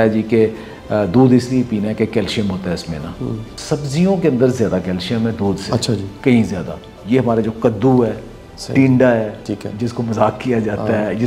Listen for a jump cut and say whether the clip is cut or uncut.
cut